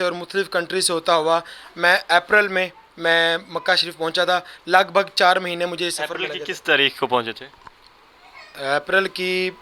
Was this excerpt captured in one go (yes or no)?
yes